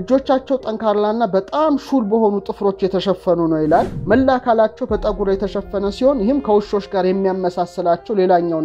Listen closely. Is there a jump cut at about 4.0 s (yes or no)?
yes